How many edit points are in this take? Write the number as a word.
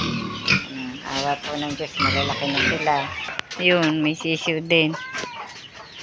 one